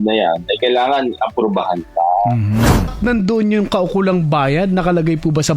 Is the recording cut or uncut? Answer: cut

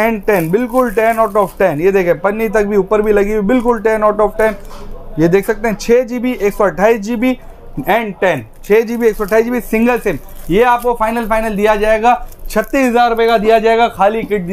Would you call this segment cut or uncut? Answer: uncut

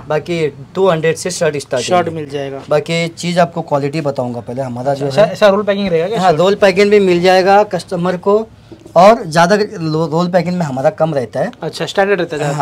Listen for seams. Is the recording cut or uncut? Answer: uncut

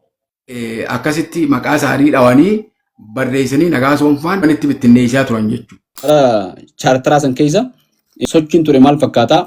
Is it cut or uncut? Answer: cut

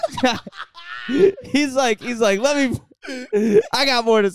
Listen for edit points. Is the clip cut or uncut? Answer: uncut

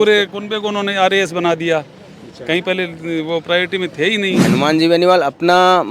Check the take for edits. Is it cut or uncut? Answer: cut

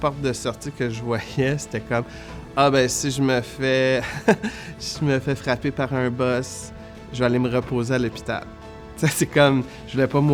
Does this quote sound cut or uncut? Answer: uncut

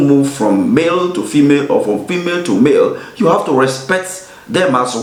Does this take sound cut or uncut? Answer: uncut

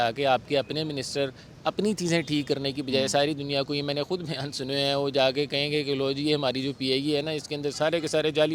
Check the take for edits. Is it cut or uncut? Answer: uncut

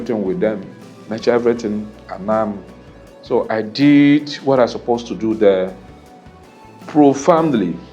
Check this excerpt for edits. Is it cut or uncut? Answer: uncut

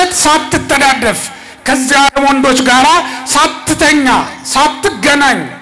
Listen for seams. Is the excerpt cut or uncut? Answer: uncut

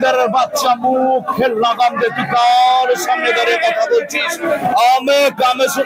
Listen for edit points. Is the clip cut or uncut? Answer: uncut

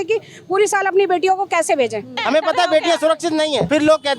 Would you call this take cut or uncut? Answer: cut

